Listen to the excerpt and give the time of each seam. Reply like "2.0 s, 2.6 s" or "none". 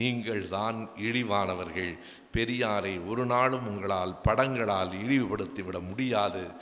none